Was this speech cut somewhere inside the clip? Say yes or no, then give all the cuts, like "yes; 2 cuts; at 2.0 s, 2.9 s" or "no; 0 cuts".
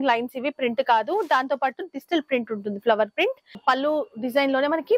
yes; 1 cut; at 3.5 s